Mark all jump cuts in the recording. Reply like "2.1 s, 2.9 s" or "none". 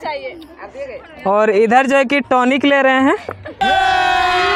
none